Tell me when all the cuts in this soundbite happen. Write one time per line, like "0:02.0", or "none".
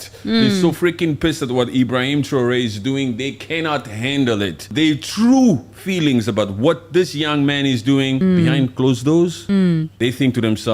0:04.7
0:08.2
0:09.7